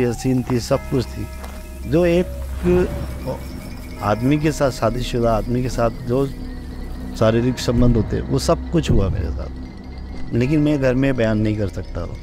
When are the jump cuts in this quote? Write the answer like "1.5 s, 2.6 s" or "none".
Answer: none

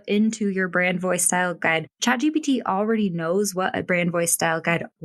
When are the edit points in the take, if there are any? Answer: none

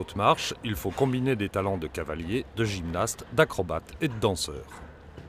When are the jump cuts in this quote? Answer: none

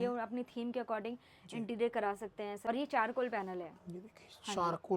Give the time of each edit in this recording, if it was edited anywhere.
2.7 s

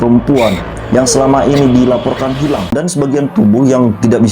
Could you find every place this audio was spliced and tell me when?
2.7 s

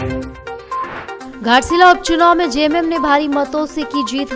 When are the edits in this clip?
1.2 s

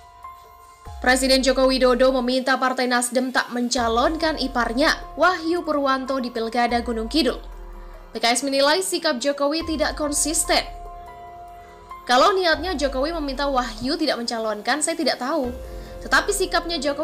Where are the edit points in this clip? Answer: 1.0 s

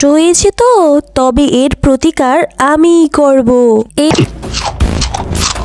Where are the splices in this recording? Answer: 4.1 s

